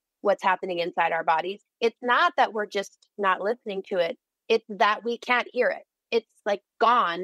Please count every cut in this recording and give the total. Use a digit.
2